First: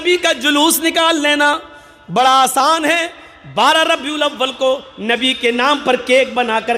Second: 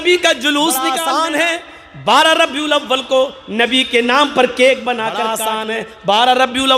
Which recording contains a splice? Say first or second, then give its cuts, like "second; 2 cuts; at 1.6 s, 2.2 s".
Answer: second; 2 cuts; at 1.0 s, 5.3 s